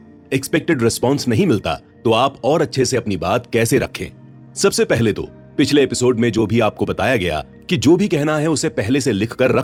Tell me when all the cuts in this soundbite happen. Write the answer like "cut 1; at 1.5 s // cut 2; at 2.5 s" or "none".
none